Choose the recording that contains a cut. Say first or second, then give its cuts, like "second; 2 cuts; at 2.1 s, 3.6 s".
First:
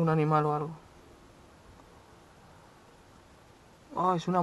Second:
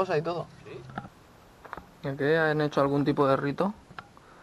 second; 1 cut; at 1.1 s